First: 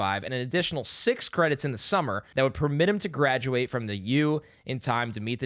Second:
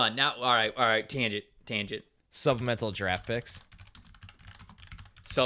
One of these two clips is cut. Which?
first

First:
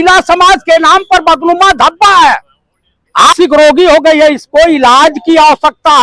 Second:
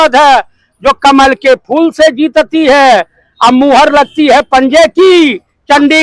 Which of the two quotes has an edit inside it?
first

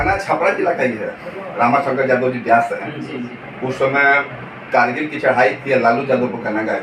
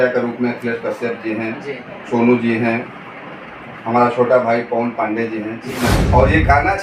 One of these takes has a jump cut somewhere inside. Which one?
second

